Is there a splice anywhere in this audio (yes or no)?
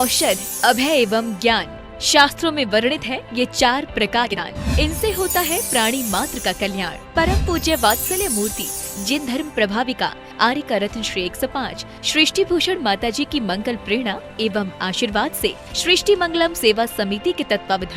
yes